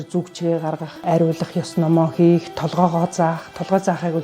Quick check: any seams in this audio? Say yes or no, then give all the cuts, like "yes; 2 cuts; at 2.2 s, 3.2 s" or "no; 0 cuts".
yes; 1 cut; at 1.0 s